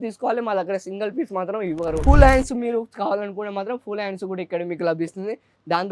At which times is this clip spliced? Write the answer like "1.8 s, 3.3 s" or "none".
2.0 s